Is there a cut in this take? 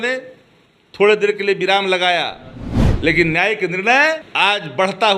yes; 1 cut; at 4.3 s

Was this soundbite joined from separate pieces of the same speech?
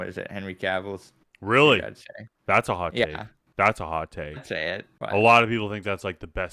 yes; 1 cut; at 4.9 s

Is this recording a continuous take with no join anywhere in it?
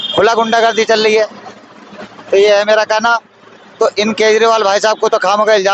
yes; 0 cuts

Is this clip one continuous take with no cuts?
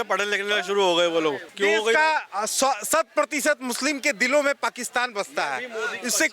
no; 1 cut; at 1.5 s

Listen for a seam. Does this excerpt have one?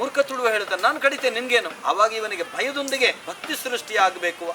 yes; 2 cuts; at 1.7 s, 3.3 s

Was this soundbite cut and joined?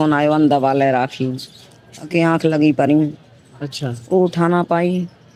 no; 0 cuts

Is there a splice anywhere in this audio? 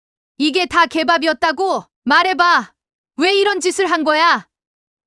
yes; 1 cut; at 1.9 s

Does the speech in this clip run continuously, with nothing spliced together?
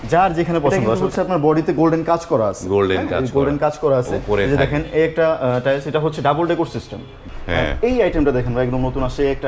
no; 3 cuts; at 0.9 s, 4.2 s, 7.2 s

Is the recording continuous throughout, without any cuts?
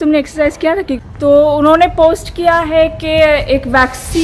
no; 1 cut; at 1.0 s

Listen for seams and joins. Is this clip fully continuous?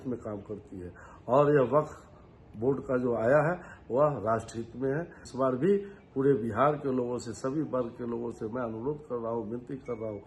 no; 1 cut; at 5.2 s

